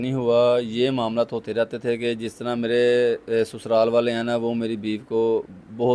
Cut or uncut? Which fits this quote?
uncut